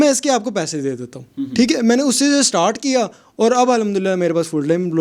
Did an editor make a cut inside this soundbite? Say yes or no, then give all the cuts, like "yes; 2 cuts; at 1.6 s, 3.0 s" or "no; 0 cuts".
no; 0 cuts